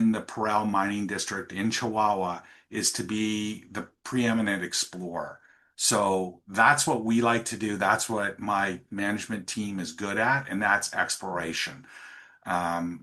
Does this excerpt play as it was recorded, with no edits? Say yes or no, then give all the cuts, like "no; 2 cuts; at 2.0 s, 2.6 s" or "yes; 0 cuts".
yes; 0 cuts